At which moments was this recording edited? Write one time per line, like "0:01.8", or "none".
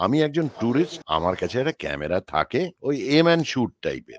0:01.0
0:02.8